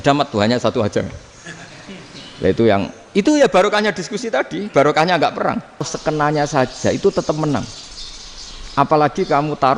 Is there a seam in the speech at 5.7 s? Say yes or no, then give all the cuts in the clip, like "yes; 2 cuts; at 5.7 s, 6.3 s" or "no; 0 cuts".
yes; 1 cut; at 5.7 s